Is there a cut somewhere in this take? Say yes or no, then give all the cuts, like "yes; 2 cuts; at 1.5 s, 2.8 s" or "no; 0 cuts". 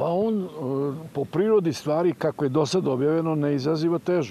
no; 0 cuts